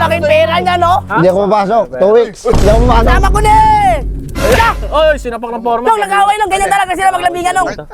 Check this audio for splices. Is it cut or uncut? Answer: uncut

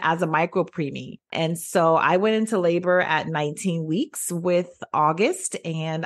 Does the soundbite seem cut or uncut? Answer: cut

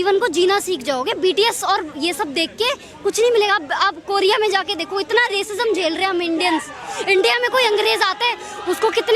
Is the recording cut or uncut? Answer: uncut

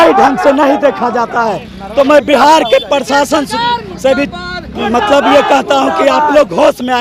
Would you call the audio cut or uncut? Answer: uncut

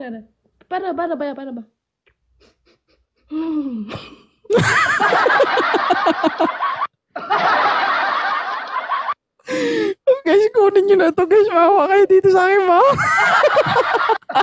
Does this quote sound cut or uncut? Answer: uncut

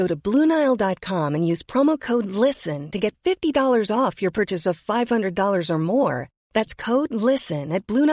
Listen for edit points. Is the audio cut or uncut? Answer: uncut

